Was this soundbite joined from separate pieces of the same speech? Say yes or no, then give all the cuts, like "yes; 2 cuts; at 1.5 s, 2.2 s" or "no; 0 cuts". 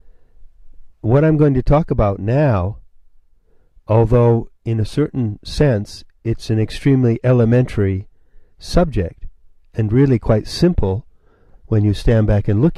no; 0 cuts